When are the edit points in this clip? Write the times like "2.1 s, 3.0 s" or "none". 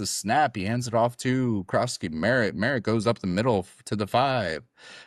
none